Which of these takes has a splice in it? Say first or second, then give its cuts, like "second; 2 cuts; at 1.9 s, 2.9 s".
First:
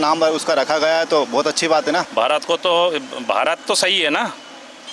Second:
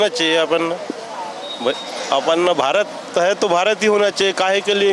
first; 1 cut; at 2.1 s